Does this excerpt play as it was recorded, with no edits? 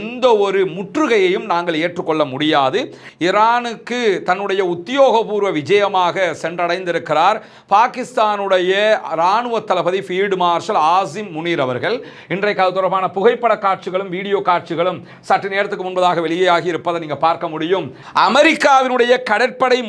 no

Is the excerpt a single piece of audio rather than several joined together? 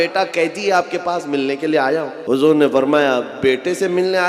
no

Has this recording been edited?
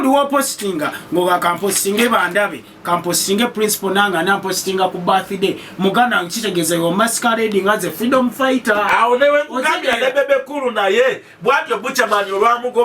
no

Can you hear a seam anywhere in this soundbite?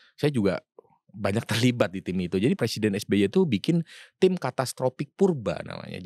yes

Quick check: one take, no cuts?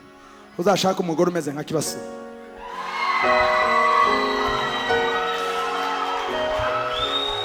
yes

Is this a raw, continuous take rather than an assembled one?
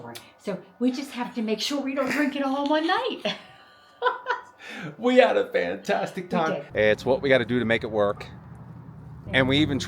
no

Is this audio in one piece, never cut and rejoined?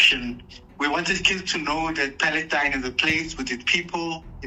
yes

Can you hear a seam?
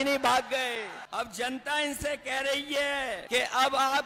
yes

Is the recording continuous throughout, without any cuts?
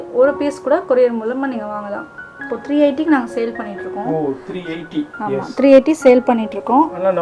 no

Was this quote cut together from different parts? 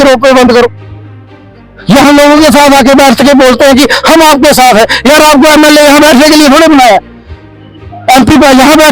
no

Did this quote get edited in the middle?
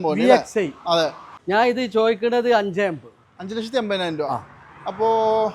yes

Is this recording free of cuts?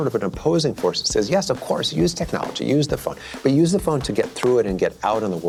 yes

